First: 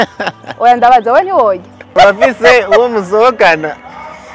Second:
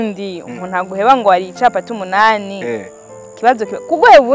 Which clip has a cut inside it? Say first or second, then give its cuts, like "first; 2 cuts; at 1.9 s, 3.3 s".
first; 1 cut; at 1.9 s